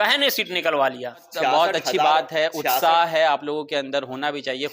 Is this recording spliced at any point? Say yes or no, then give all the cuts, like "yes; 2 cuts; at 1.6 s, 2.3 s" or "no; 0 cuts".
yes; 1 cut; at 1.3 s